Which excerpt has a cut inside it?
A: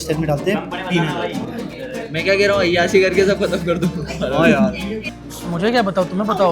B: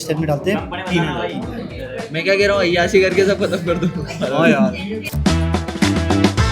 A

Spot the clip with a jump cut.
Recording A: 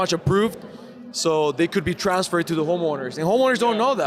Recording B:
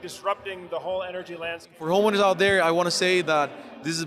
B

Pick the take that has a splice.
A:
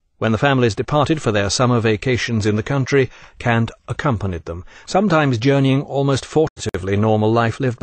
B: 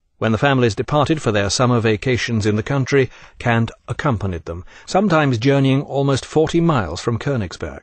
B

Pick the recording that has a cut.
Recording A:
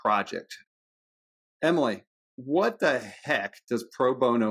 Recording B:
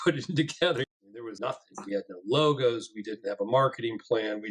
B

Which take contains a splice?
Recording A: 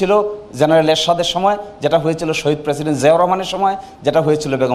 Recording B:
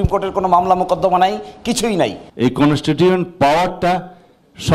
B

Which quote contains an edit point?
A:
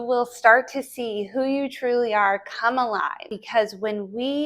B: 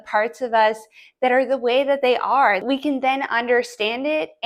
A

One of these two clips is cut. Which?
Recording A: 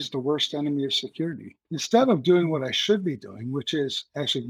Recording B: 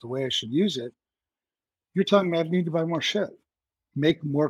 A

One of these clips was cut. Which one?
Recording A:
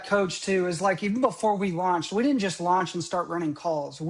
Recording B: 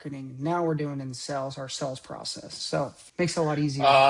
B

